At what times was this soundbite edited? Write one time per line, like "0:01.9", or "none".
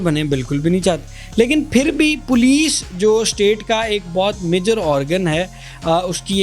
none